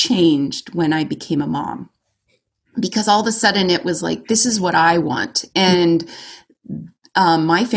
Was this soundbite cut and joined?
no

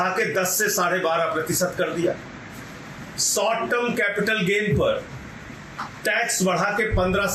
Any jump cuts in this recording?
no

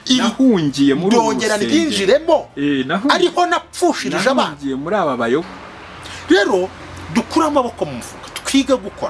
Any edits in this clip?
yes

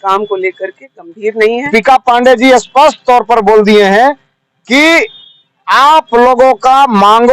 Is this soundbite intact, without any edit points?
no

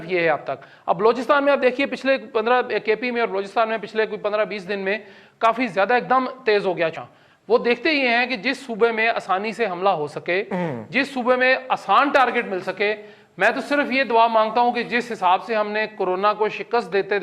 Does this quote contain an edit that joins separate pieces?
yes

